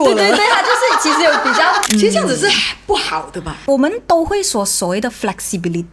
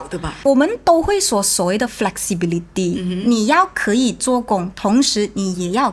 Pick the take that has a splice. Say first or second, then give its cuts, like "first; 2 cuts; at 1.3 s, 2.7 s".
first; 1 cut; at 1.9 s